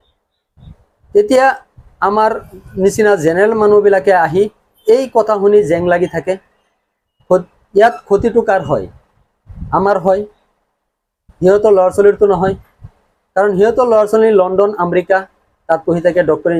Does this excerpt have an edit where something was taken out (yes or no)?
no